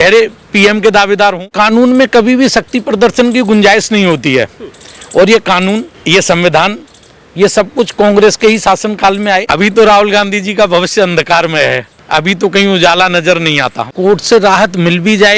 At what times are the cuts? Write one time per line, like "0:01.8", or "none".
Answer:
0:01.5
0:05.9
0:09.4
0:11.9
0:13.9

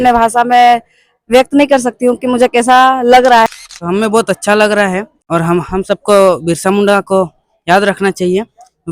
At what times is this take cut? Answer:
0:03.5
0:05.1

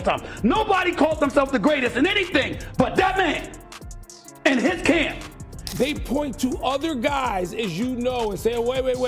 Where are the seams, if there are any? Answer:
0:05.6

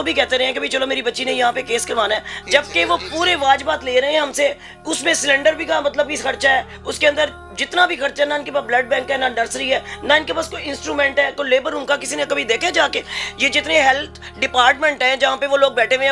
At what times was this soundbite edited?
0:02.3

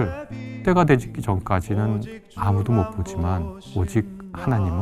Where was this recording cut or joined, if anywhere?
0:03.6

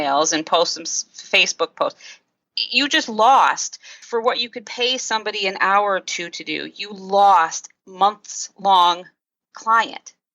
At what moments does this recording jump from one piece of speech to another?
0:04.0
0:07.9

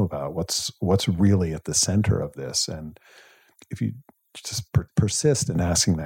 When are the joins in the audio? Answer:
0:03.6
0:04.9

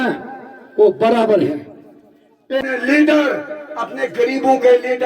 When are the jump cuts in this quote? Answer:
0:02.6

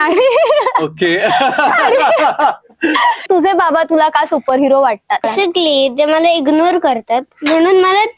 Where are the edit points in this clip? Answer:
0:03.2
0:05.3

